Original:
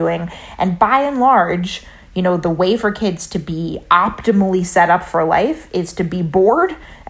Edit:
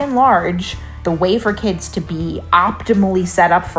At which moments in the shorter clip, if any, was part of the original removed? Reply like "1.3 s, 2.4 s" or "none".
1.0 s